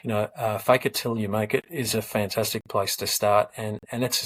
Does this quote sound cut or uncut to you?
uncut